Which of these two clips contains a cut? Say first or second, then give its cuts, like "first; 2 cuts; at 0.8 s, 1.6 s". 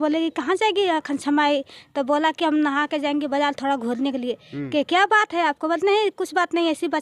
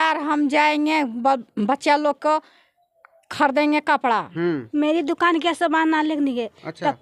second; 1 cut; at 4.6 s